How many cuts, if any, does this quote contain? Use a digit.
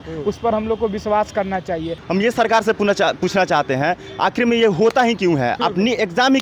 1